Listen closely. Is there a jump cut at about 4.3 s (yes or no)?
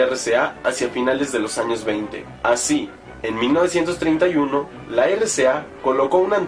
yes